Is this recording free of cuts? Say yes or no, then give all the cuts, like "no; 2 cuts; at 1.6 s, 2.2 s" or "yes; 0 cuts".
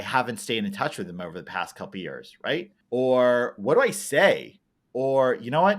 no; 1 cut; at 2.8 s